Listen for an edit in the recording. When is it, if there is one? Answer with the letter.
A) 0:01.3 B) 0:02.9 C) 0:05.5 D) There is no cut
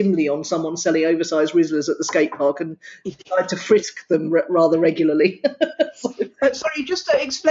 D